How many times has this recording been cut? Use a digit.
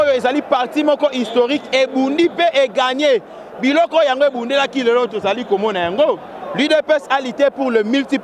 0